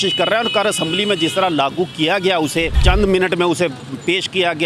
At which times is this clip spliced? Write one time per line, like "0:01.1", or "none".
0:02.8